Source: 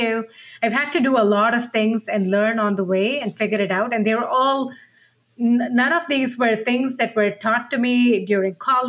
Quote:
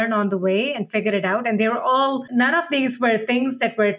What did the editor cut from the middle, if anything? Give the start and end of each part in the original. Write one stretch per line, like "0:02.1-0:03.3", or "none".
0:04.8-0:05.7